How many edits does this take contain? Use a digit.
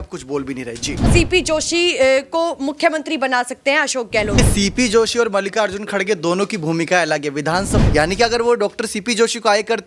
3